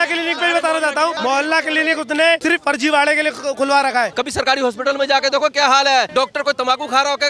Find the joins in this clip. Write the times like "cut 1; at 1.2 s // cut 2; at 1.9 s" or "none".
cut 1; at 1.2 s // cut 2; at 2.4 s // cut 3; at 4.1 s // cut 4; at 6.1 s

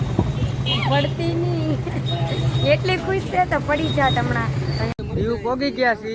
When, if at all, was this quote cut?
cut 1; at 4.9 s

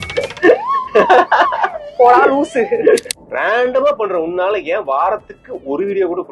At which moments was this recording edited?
cut 1; at 3.1 s

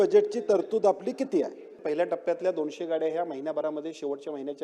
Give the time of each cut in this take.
cut 1; at 1.8 s

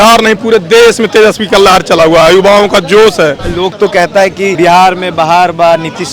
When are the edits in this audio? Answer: cut 1; at 3.4 s // cut 2; at 4.5 s

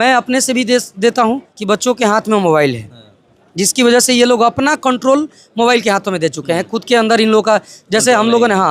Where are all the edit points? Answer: cut 1; at 1.5 s

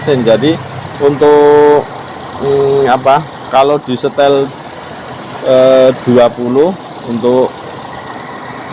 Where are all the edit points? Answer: none

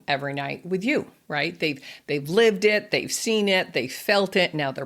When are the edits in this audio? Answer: cut 1; at 1.2 s

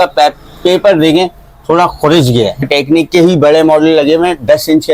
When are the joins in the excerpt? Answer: cut 1; at 2.6 s

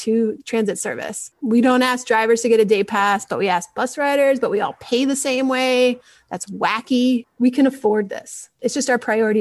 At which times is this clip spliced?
cut 1; at 1.4 s // cut 2; at 7.3 s // cut 3; at 8.5 s

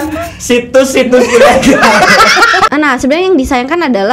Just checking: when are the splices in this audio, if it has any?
cut 1; at 2.7 s

